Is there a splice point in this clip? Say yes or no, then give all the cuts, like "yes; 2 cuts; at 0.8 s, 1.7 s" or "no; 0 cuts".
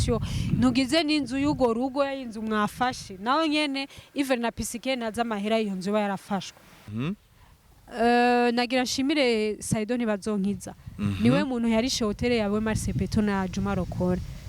yes; 1 cut; at 6.9 s